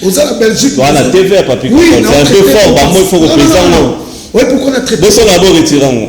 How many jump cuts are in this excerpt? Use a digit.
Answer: 0